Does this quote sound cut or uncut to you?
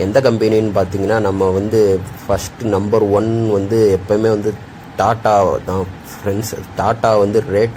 uncut